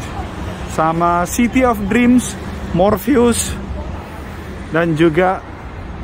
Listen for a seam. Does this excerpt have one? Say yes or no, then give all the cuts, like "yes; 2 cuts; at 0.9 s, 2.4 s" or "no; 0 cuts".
no; 0 cuts